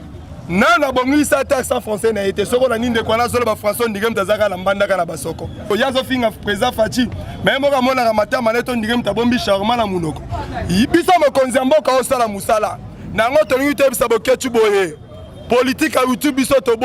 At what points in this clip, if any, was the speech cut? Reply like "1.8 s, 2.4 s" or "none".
5.7 s